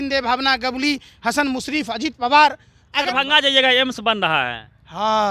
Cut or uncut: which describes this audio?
cut